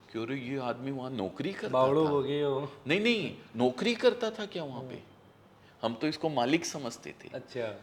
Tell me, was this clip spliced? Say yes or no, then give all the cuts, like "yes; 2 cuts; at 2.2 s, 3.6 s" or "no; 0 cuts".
no; 0 cuts